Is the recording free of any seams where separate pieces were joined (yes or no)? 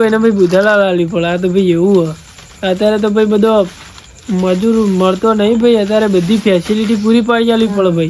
yes